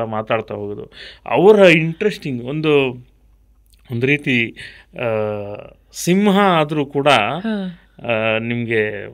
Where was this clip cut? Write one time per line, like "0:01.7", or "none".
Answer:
none